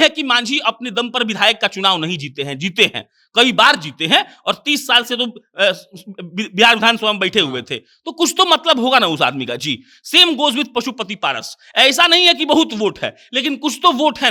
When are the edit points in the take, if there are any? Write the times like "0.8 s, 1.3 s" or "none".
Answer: none